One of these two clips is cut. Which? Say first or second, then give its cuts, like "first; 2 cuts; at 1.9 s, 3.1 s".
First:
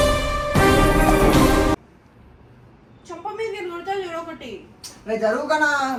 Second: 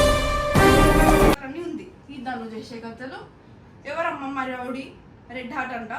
second; 1 cut; at 1.3 s